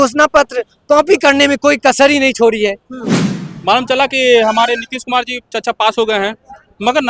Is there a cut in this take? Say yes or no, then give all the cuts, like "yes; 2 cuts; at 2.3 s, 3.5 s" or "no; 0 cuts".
yes; 1 cut; at 3.0 s